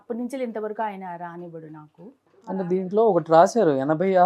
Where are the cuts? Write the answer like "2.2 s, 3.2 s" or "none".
2.5 s